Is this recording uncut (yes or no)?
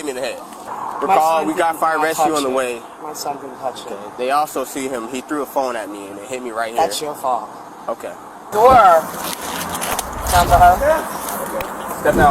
no